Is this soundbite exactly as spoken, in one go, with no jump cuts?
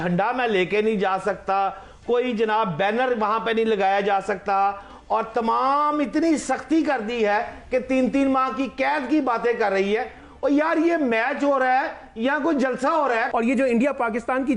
no; 1 cut; at 13.3 s

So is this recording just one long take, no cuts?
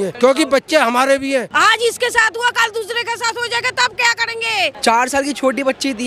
no; 2 cuts; at 1.5 s, 4.8 s

